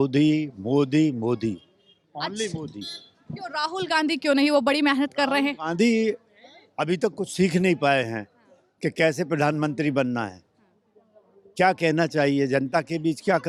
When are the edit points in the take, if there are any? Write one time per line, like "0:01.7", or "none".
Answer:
none